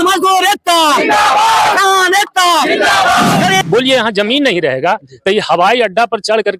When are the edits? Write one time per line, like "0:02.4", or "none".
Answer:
0:03.6